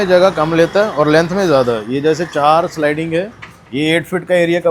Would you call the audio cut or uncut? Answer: uncut